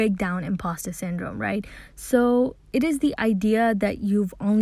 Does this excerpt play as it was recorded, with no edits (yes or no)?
yes